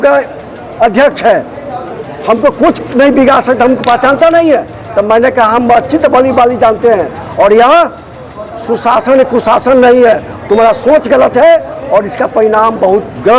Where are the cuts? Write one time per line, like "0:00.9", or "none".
none